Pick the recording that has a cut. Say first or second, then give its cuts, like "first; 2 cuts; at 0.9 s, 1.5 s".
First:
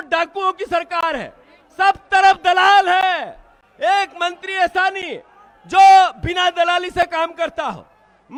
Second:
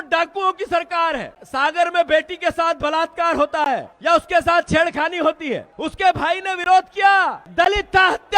second; 4 cuts; at 1.4 s, 3.9 s, 5.8 s, 7.4 s